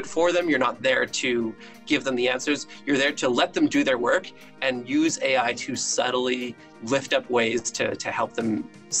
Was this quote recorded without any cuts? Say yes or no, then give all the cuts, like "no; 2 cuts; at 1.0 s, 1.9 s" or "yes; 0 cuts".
yes; 0 cuts